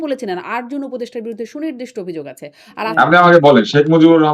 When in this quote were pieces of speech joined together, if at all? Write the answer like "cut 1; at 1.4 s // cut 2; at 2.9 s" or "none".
cut 1; at 2.9 s